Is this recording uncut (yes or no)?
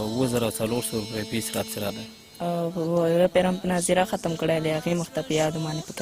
no